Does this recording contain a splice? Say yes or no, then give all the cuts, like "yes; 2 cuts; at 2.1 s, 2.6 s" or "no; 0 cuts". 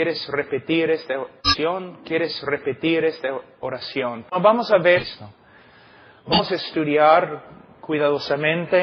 no; 0 cuts